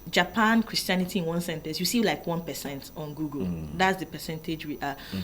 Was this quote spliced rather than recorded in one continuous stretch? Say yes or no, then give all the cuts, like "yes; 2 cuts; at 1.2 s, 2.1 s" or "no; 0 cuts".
no; 0 cuts